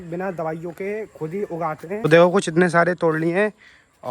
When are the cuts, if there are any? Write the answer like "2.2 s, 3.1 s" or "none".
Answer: 1.9 s